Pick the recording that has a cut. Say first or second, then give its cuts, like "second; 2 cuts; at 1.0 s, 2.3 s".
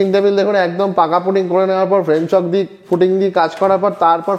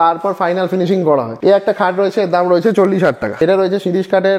second; 2 cuts; at 1.3 s, 3.4 s